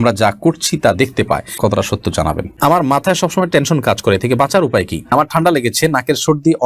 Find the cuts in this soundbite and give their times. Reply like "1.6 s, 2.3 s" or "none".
1.5 s, 2.6 s, 5.1 s